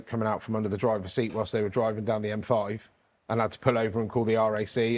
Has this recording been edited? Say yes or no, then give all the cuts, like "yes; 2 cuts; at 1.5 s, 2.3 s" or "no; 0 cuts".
no; 0 cuts